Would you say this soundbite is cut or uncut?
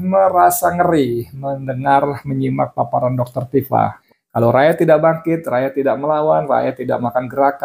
cut